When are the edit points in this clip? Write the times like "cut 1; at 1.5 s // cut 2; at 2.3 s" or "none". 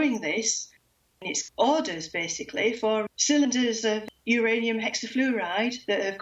cut 1; at 1.2 s